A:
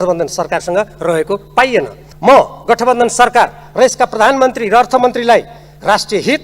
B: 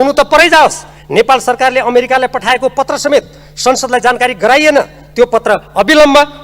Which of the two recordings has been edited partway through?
A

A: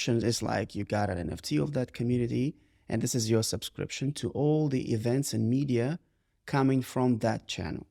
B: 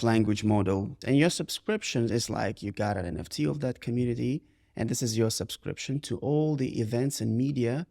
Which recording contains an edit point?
B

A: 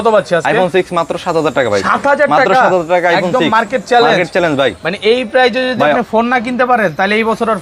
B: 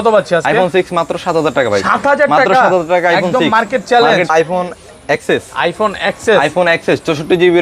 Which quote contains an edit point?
B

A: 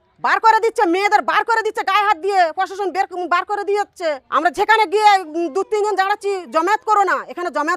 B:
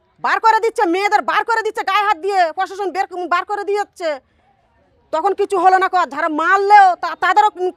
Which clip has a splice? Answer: A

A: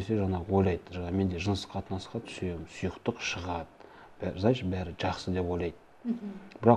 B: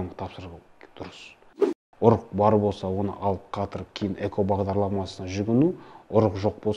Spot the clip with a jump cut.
B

